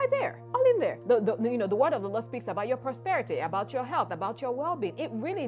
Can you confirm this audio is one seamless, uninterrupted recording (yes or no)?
no